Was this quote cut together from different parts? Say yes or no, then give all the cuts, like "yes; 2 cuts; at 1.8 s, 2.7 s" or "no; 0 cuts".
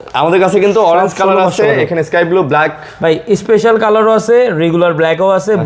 no; 0 cuts